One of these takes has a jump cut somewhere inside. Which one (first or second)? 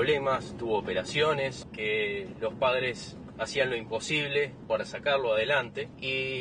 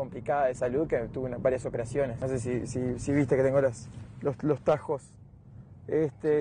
second